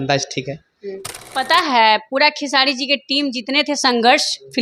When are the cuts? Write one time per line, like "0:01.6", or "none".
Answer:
0:01.4